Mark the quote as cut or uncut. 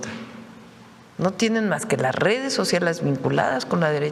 uncut